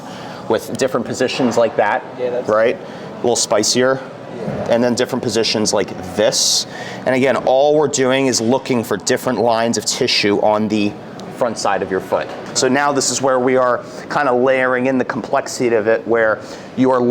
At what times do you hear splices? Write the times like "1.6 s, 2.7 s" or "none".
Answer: 12.4 s